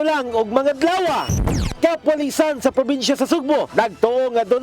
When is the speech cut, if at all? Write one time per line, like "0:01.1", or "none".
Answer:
0:01.4